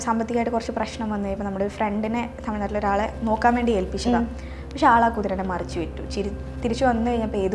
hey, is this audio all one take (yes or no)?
yes